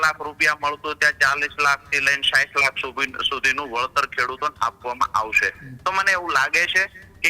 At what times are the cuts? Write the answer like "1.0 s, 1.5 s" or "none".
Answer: none